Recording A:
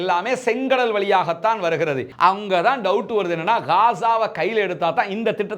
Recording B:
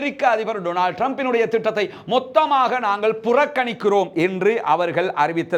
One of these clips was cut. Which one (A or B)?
A